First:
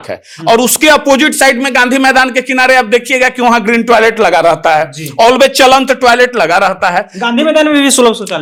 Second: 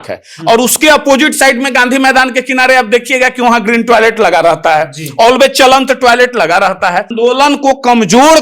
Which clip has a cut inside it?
second; 1 cut; at 7.1 s

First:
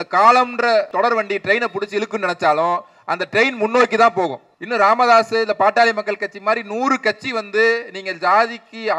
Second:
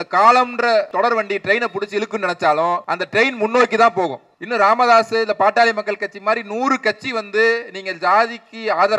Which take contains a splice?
second; 1 cut; at 2.9 s

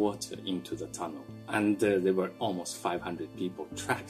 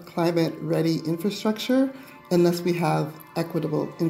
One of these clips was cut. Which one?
first; 2 cuts; at 1.4 s, 2.3 s

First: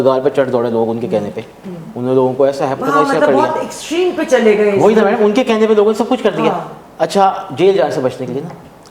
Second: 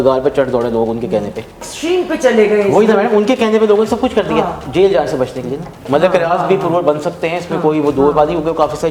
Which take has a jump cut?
second; 3 cuts; at 1.7 s, 4.6 s, 5.9 s

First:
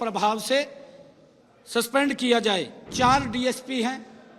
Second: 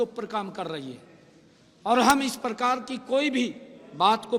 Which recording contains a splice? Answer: first; 1 cut; at 2.8 s

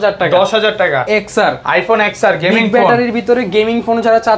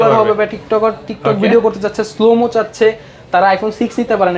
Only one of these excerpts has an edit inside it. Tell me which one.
first; 1 cut; at 1.1 s

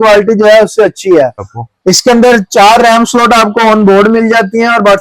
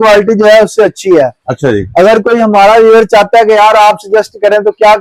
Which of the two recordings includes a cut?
first; 1 cut; at 1.5 s

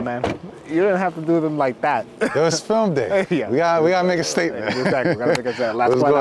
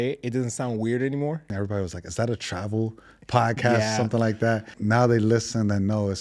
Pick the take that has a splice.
second; 2 cuts; at 1.5 s, 4.7 s

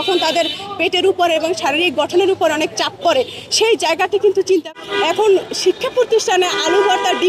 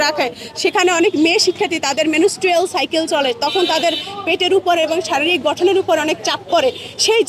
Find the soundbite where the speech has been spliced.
first; 1 cut; at 4.7 s

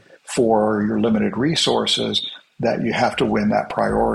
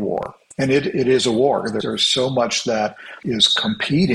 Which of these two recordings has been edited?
second; 2 cuts; at 1.8 s, 3.1 s

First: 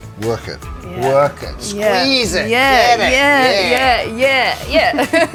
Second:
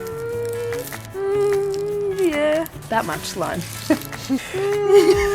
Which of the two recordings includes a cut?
second; 3 cuts; at 1.0 s, 2.8 s, 4.4 s

